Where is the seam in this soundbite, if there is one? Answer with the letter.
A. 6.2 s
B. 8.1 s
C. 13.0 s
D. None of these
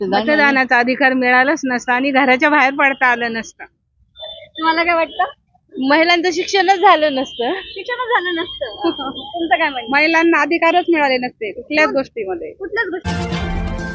C